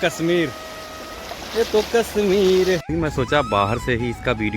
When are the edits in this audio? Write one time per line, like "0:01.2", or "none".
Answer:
0:02.9